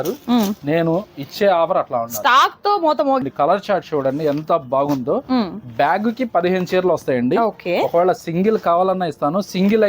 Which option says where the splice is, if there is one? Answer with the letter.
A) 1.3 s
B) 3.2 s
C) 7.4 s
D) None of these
B